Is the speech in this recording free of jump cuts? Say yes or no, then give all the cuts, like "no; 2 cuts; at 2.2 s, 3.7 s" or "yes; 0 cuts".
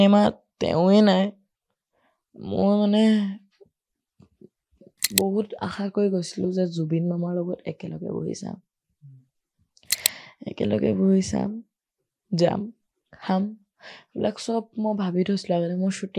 yes; 0 cuts